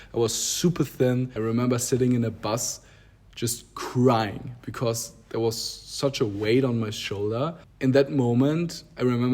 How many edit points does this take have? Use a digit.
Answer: 2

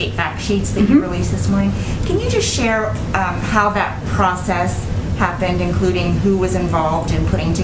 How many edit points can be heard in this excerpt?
0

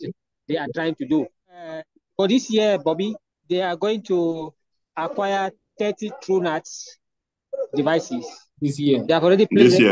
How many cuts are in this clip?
3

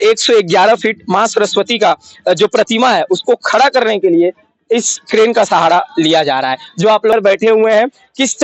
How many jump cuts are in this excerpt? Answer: 1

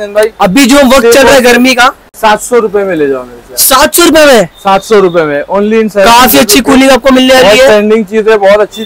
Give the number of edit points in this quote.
0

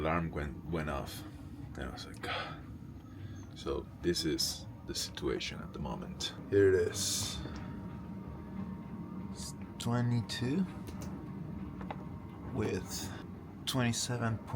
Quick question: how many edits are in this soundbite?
0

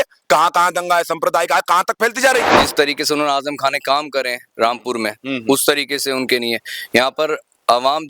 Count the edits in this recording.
1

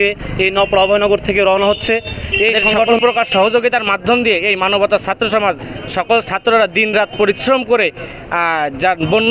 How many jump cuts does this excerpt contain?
1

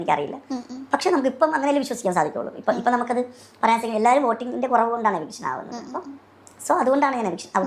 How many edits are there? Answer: 0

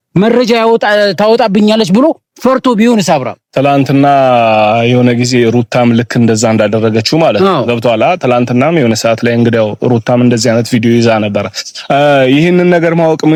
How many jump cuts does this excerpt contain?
0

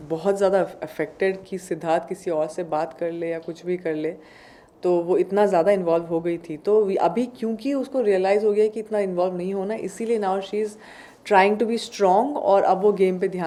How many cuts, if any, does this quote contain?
0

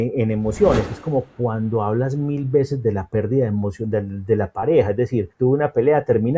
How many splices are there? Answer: 2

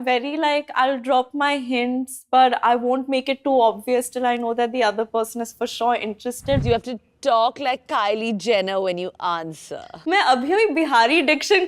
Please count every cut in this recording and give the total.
2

